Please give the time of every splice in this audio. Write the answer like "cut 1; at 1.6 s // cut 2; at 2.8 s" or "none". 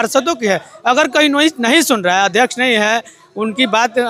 none